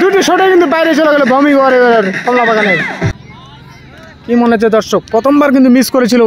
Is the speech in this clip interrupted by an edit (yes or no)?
yes